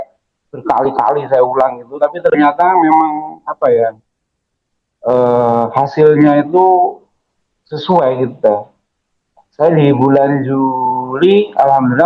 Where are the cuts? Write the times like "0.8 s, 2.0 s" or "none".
none